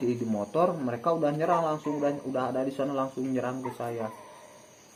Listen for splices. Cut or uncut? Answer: uncut